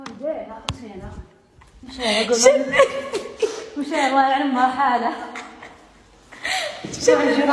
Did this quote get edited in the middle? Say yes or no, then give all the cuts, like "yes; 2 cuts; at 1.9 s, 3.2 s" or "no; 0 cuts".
no; 0 cuts